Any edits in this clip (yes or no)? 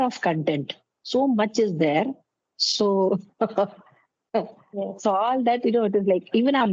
no